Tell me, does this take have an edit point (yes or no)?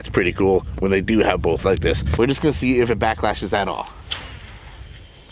yes